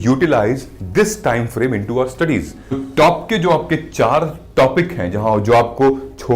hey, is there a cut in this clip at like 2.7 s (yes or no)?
yes